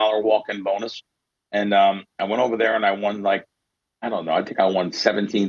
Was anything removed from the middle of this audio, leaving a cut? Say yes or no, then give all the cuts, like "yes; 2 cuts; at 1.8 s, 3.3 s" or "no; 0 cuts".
no; 0 cuts